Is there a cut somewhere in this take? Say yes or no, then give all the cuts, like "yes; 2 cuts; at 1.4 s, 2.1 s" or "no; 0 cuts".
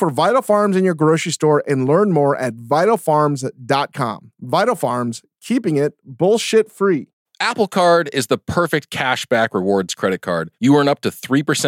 yes; 1 cut; at 7.2 s